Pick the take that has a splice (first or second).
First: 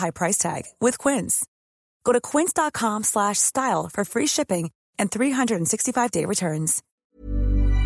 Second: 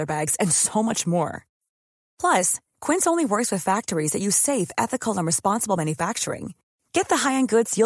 first